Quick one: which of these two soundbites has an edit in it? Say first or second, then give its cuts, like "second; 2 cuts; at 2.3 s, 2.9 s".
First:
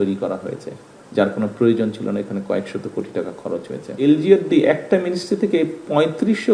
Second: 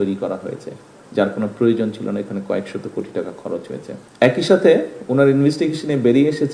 first; 1 cut; at 4.0 s